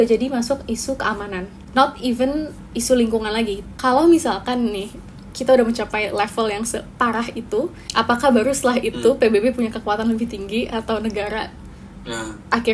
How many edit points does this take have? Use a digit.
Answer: 3